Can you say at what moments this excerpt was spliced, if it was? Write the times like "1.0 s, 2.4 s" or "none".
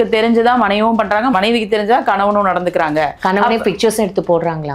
1.3 s